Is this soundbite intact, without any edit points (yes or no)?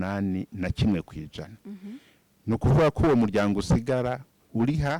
yes